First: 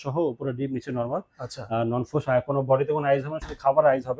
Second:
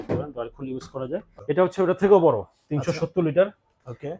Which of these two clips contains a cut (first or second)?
second